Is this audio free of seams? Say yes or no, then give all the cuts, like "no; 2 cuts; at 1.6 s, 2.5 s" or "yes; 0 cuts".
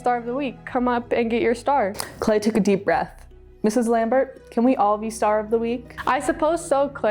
no; 2 cuts; at 2.0 s, 5.9 s